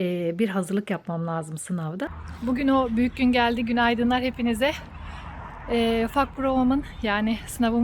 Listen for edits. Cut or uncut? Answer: cut